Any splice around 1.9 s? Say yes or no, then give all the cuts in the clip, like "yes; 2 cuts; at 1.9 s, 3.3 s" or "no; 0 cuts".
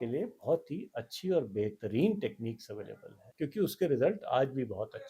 no; 1 cut; at 3.2 s